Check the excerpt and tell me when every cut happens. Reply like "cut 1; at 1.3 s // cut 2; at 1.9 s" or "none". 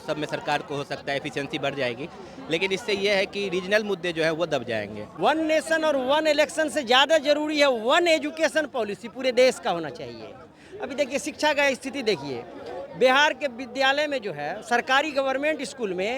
cut 1; at 5.0 s